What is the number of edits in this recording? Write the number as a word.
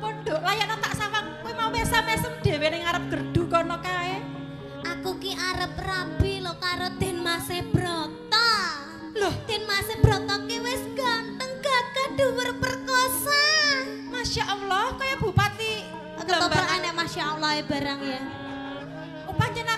zero